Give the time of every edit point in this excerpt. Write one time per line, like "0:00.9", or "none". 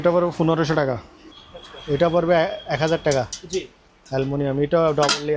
0:01.2